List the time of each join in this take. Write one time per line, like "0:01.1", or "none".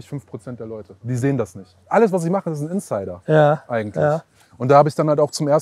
0:00.9
0:01.9